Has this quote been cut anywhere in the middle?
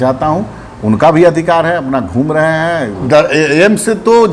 yes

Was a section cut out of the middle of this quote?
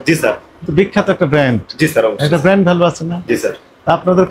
no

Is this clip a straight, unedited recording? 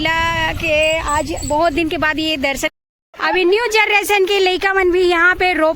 no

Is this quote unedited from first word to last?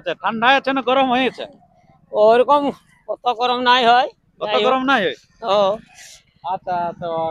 yes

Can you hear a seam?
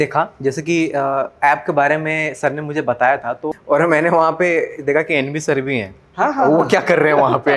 yes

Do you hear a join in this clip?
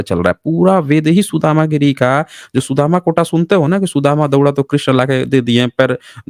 no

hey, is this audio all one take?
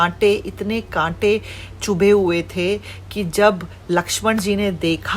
yes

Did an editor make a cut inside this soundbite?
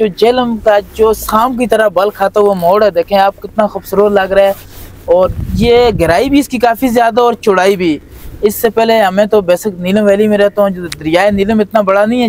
no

